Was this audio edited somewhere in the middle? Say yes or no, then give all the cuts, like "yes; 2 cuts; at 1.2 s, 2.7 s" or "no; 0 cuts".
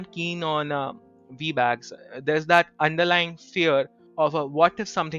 yes; 1 cut; at 4.0 s